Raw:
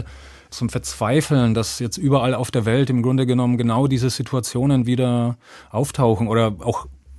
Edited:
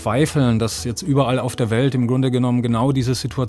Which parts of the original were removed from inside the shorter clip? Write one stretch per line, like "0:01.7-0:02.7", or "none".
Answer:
none